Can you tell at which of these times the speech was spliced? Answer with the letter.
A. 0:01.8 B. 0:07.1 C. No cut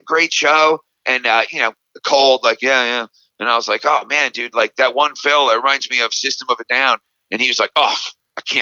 C